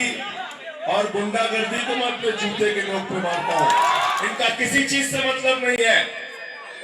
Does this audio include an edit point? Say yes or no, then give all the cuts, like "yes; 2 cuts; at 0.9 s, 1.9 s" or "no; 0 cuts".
yes; 1 cut; at 4.1 s